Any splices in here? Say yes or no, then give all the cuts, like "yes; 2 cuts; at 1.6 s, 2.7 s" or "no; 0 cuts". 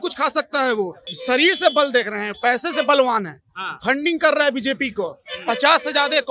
yes; 1 cut; at 1.0 s